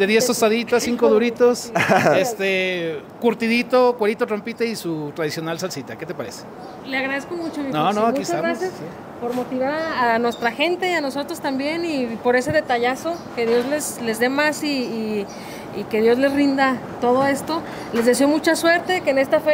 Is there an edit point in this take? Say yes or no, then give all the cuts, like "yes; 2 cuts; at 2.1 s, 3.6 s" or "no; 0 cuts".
no; 0 cuts